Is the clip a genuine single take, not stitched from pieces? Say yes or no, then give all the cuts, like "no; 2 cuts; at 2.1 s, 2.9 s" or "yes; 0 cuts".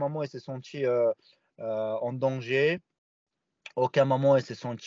yes; 0 cuts